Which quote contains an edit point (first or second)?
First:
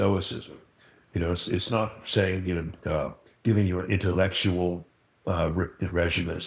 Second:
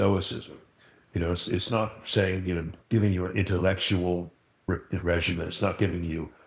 second